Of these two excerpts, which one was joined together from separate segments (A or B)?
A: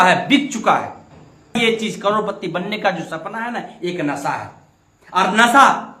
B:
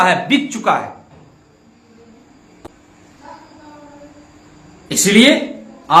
A